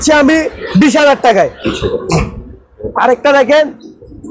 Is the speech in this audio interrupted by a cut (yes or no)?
no